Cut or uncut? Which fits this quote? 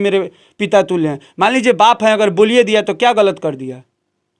uncut